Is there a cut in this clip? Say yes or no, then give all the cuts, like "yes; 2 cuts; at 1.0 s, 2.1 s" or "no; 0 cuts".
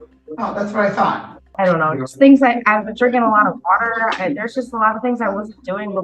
yes; 1 cut; at 1.4 s